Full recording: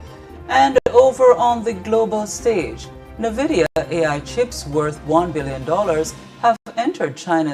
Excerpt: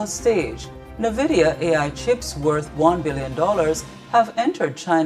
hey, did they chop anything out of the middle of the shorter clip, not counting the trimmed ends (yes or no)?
yes